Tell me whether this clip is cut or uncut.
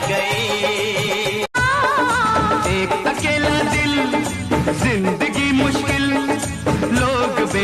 uncut